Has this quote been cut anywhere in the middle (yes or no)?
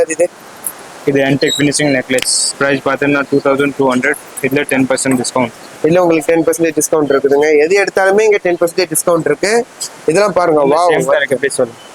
no